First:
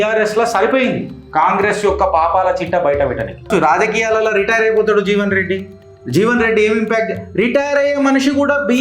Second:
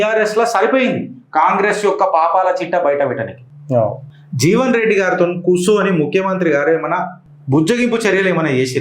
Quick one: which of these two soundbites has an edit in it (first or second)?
first